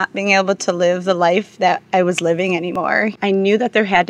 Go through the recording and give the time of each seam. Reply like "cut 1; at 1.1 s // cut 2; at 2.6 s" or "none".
cut 1; at 3.1 s